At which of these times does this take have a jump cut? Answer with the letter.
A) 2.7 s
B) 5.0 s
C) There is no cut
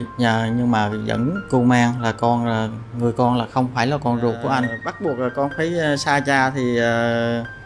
B